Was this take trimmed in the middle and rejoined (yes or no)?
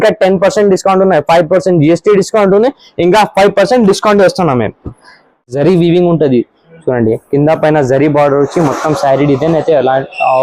yes